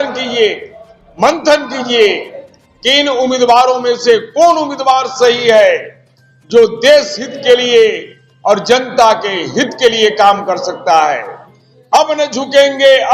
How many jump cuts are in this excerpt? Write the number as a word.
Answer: zero